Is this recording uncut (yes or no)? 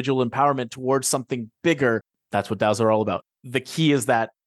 no